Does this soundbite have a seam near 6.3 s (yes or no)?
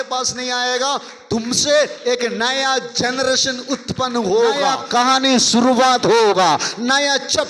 no